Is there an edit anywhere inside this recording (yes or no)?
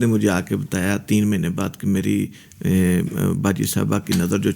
no